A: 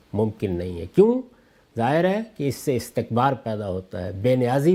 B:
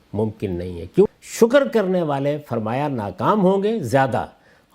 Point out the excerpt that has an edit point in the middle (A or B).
B